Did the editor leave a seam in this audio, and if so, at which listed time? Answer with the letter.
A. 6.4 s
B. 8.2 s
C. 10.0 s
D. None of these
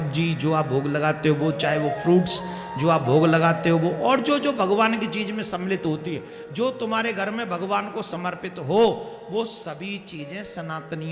D